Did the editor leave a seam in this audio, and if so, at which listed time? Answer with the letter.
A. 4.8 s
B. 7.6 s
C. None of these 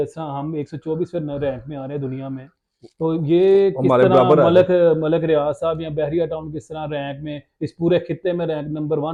C